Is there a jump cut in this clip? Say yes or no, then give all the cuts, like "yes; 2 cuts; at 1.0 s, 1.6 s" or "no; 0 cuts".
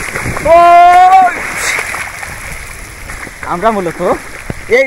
yes; 1 cut; at 3.1 s